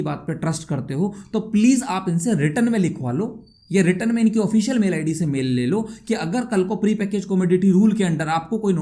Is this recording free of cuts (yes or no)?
yes